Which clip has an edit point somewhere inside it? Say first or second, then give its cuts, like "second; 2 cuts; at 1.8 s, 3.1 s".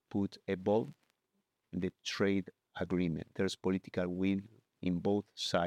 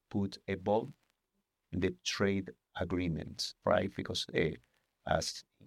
first; 1 cut; at 3.2 s